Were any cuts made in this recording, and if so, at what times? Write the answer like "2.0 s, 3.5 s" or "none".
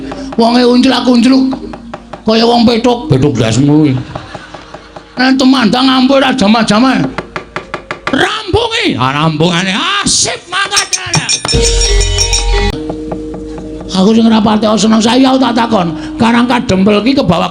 12.7 s